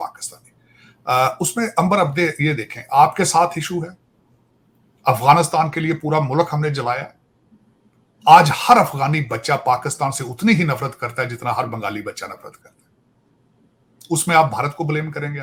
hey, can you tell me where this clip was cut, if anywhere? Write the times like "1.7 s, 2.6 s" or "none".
none

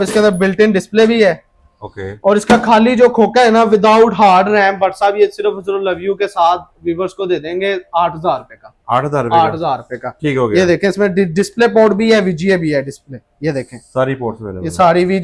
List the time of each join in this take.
none

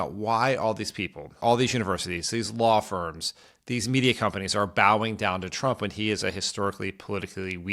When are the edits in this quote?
1.3 s

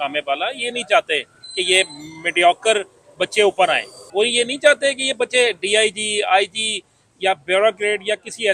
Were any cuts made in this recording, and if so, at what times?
none

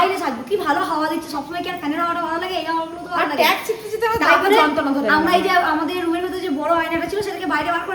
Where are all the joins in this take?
none

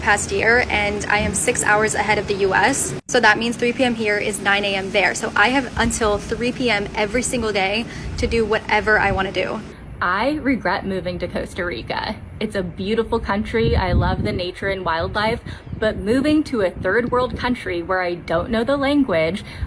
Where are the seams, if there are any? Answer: 9.7 s

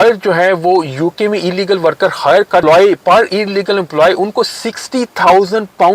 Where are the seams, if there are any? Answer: 2.6 s

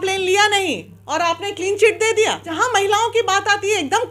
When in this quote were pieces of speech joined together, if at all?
2.5 s

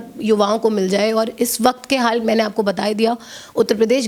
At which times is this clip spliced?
none

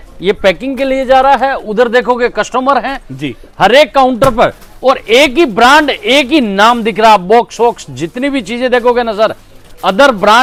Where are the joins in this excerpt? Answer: none

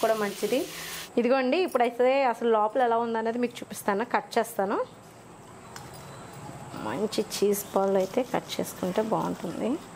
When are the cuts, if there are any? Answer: 1.0 s

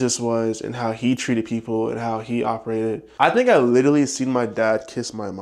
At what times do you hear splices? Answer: 3.1 s

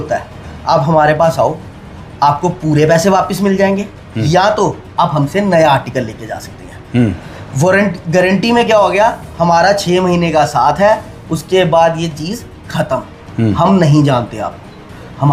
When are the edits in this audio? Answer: none

